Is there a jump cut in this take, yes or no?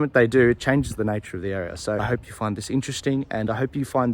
yes